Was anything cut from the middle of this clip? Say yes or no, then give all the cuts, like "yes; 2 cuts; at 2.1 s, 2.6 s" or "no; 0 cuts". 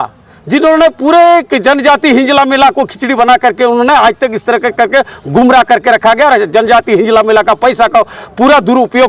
no; 0 cuts